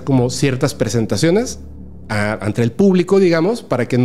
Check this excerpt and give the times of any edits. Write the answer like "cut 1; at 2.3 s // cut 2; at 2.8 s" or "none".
none